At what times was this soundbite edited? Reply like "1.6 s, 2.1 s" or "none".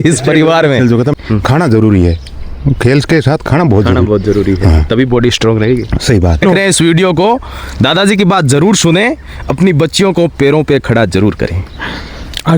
1.1 s, 6.4 s